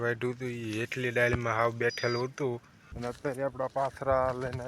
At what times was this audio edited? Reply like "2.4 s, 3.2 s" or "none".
3.0 s

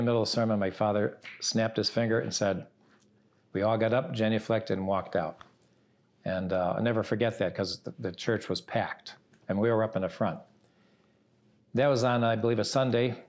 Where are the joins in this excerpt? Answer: none

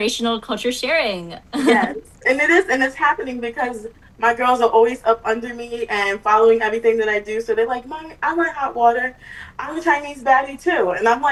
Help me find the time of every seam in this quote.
none

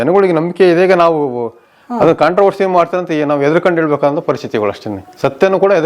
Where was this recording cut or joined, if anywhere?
none

